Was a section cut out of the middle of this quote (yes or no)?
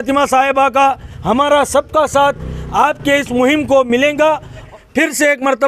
yes